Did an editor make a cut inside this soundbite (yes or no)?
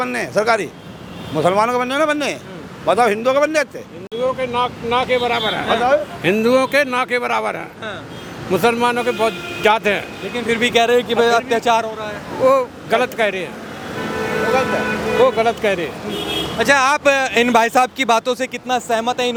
no